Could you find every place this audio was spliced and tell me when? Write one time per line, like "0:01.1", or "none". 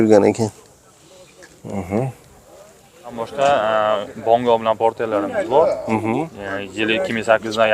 0:03.2